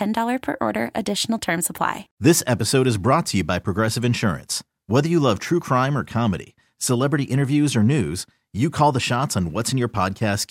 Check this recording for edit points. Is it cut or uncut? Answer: cut